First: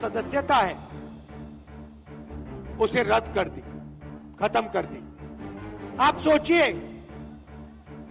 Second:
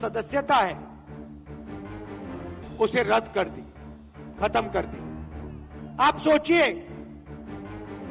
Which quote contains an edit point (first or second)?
first